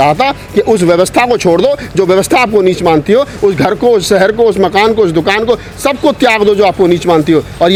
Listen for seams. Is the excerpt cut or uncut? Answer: uncut